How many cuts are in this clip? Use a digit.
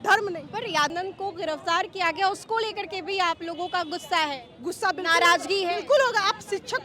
1